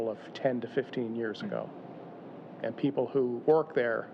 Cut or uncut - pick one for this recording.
cut